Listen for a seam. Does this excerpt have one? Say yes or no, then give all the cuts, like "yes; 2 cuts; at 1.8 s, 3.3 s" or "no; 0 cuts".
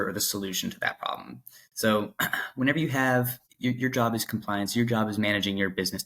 yes; 1 cut; at 3.4 s